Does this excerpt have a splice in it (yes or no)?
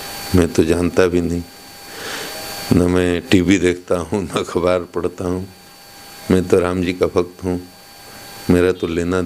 no